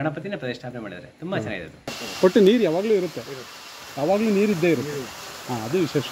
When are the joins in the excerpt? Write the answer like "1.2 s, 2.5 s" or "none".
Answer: 2.2 s

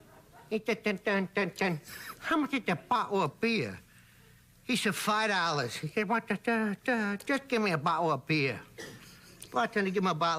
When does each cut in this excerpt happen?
6.1 s

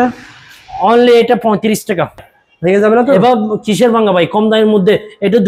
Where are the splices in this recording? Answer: 2.3 s

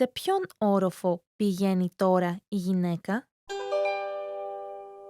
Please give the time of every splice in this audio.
3.3 s

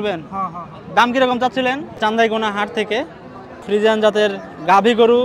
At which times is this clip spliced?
2.0 s, 3.6 s

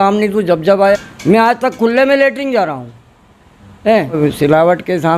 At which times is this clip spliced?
1.0 s, 4.1 s

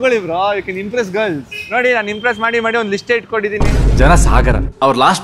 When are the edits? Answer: none

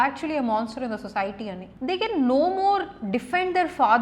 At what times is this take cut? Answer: 1.7 s

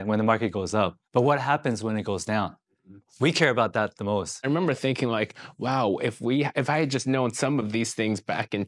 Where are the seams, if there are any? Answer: 4.4 s

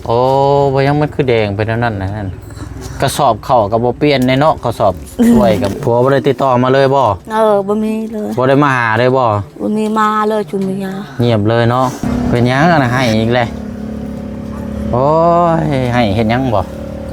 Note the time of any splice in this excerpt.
5.7 s, 12.0 s

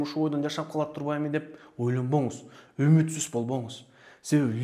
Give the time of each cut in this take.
none

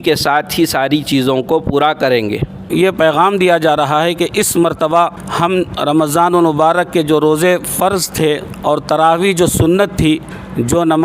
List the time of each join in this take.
2.6 s

